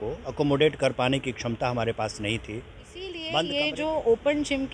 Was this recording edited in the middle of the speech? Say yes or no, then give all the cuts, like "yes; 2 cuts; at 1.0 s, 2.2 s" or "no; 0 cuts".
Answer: yes; 1 cut; at 3.3 s